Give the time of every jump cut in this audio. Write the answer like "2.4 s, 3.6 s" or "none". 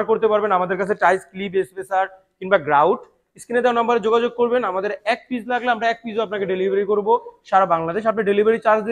none

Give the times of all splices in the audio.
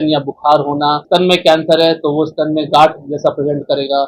1.0 s

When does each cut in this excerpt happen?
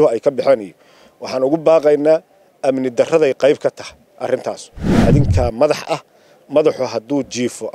4.9 s

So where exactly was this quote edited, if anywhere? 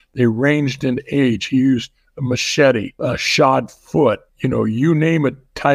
2.9 s, 4.3 s

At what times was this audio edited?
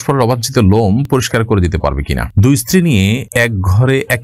2.3 s

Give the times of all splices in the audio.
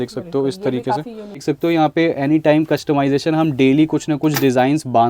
1.5 s

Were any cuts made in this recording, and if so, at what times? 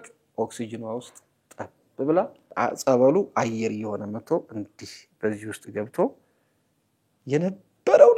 2.4 s

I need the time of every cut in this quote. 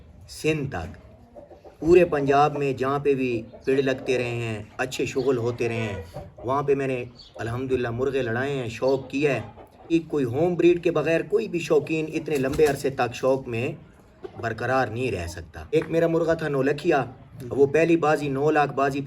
9.8 s, 15.7 s

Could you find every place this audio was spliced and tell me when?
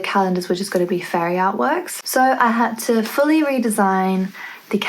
2.0 s

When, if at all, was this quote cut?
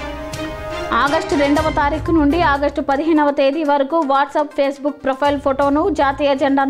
0.9 s

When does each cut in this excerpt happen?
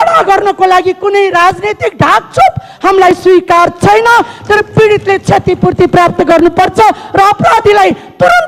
none

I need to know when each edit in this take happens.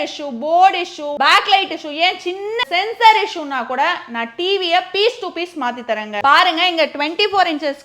1.1 s, 2.6 s, 6.1 s

